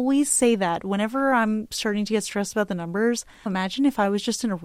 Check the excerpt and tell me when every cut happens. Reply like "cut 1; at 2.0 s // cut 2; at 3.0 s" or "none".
cut 1; at 3.5 s